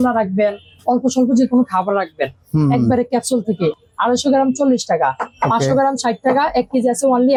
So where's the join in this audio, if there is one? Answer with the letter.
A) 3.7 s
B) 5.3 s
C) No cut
C